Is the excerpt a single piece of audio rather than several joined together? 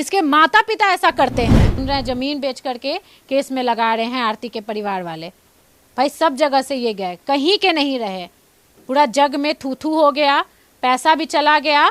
no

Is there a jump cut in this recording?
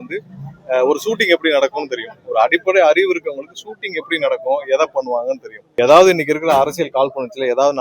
yes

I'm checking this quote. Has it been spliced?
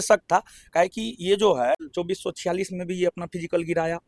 yes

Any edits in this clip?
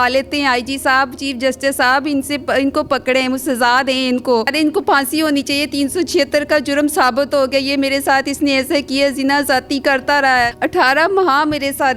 yes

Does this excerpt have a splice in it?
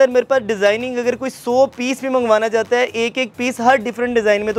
no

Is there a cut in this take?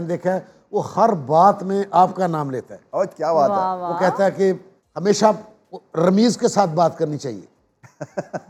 no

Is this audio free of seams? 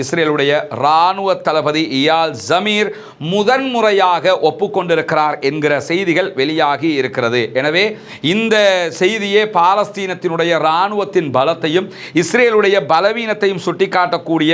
yes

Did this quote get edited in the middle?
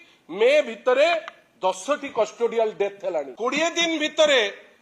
yes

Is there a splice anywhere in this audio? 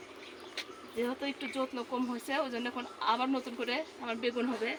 no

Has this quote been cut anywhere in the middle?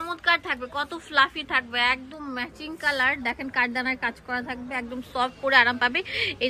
no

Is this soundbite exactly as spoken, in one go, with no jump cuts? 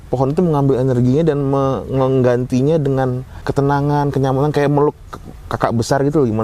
no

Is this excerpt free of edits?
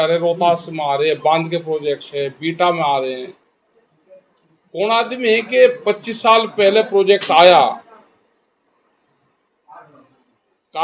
yes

